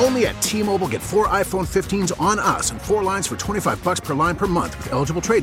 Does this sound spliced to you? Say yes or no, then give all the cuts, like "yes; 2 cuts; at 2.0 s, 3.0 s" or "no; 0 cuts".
no; 0 cuts